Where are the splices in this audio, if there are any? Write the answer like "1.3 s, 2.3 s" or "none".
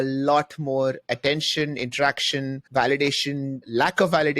1.0 s, 2.6 s